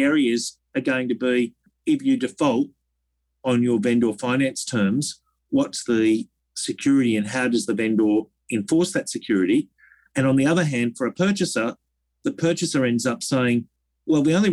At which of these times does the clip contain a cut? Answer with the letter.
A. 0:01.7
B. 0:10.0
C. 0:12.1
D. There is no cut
A